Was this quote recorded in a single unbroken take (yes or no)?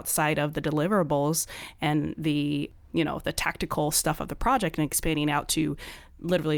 yes